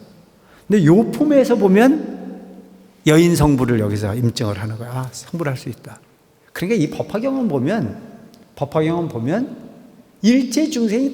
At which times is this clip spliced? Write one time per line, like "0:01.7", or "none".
none